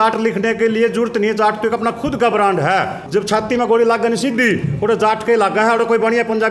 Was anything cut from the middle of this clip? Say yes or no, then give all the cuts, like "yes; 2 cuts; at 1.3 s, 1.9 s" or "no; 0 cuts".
yes; 1 cut; at 3.0 s